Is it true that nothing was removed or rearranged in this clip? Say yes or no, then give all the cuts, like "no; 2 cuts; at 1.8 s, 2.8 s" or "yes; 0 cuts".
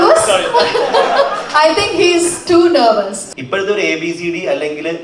no; 1 cut; at 3.2 s